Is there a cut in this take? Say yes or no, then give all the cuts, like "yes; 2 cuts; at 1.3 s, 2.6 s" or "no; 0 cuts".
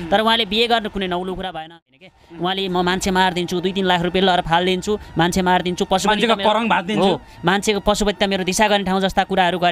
yes; 1 cut; at 1.9 s